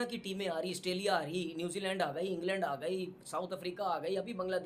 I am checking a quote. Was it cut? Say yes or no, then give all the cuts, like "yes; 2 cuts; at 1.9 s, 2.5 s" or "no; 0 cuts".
no; 0 cuts